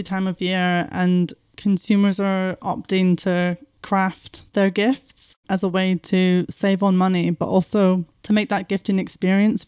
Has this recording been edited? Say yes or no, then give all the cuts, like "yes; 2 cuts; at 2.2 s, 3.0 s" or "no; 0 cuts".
no; 0 cuts